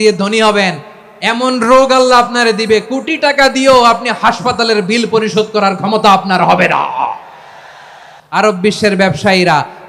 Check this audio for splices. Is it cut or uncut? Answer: cut